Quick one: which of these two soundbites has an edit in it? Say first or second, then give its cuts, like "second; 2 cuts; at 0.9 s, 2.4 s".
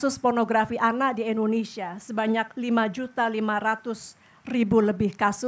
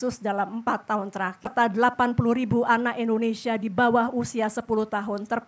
second; 1 cut; at 1.5 s